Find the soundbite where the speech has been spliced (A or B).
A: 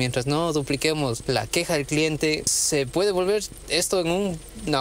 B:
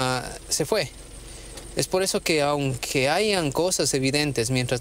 A